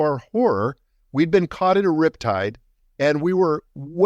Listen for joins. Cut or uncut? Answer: uncut